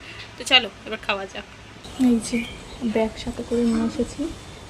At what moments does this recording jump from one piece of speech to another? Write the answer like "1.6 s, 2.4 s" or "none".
1.9 s